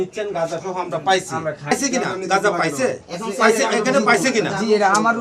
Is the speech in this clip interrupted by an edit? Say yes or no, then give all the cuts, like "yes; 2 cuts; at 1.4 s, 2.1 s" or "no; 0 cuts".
yes; 1 cut; at 1.7 s